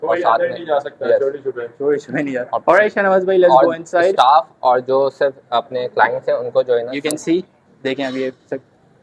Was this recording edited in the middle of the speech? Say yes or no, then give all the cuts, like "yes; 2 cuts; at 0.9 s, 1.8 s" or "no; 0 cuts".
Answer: no; 0 cuts